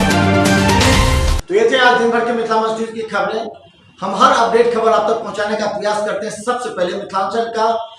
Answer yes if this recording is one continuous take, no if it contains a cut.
yes